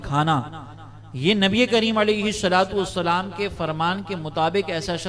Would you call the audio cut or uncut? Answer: uncut